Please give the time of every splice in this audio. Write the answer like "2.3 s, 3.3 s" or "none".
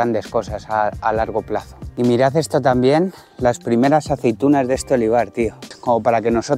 1.8 s, 5.7 s